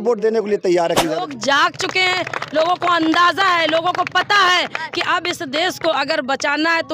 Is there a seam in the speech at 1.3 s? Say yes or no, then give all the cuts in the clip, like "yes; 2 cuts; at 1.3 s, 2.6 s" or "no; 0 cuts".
yes; 1 cut; at 1.3 s